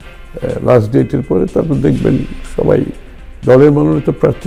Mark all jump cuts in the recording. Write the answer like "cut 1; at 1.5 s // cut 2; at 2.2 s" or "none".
none